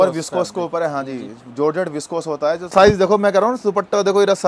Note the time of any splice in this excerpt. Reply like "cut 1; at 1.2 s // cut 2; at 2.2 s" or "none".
cut 1; at 2.7 s